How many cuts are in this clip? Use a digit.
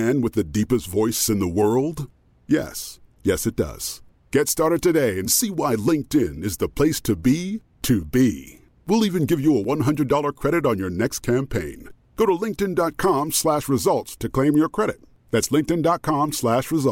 0